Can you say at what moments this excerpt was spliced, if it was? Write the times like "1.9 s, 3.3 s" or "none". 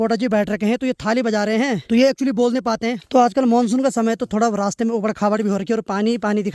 1.8 s, 3.0 s